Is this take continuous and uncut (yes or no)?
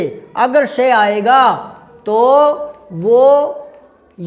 yes